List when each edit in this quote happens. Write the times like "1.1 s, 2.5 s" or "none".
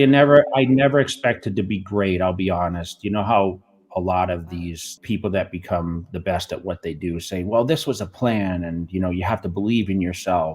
4.9 s